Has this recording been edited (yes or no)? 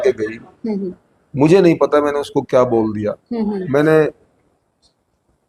no